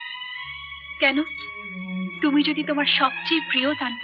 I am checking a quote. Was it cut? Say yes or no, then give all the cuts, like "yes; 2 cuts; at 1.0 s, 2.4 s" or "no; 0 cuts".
no; 0 cuts